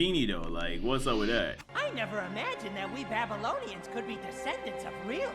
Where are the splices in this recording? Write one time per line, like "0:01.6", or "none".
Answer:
0:01.6